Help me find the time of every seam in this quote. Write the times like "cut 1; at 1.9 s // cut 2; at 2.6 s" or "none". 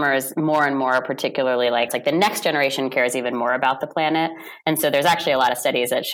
cut 1; at 1.9 s